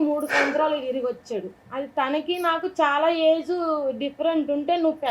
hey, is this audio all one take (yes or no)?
no